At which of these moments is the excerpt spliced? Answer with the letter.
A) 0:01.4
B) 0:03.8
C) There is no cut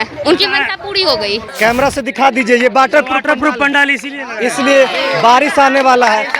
A